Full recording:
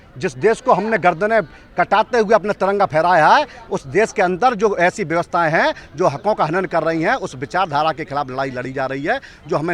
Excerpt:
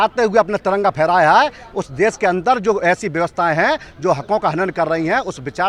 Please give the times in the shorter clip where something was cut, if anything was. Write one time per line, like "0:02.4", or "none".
none